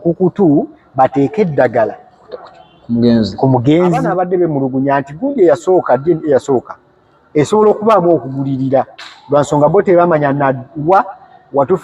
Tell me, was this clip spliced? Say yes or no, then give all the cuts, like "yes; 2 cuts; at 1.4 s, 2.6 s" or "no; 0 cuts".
yes; 1 cut; at 4.1 s